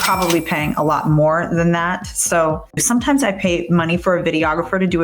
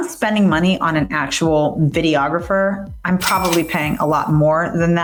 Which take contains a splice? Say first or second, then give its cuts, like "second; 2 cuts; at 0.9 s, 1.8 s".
first; 1 cut; at 2.8 s